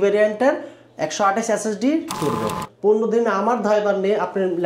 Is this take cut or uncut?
cut